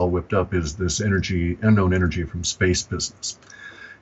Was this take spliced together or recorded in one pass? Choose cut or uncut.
cut